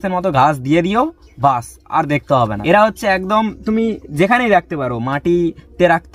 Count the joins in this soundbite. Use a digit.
1